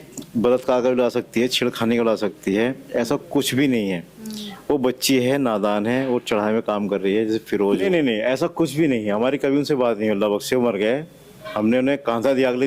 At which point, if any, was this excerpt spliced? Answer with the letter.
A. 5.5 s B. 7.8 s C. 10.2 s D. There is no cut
B